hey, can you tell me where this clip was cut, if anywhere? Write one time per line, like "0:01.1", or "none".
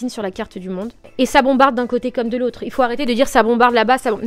0:01.0